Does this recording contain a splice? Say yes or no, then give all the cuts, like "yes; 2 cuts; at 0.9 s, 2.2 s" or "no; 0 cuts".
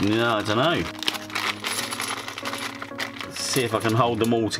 yes; 1 cut; at 0.9 s